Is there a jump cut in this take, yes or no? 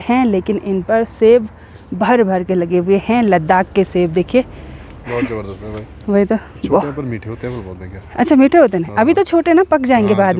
no